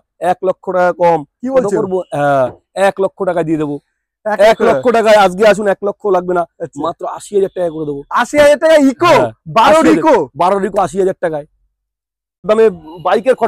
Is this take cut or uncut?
cut